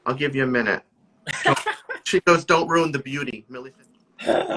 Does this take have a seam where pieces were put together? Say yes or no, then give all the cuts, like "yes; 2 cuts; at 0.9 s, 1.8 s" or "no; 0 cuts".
yes; 1 cut; at 3.4 s